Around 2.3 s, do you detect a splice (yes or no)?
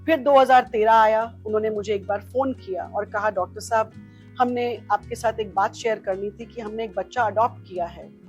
no